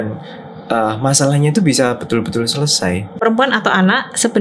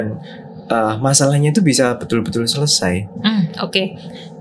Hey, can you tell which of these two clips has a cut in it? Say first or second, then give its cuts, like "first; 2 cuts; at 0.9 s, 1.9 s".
first; 1 cut; at 3.2 s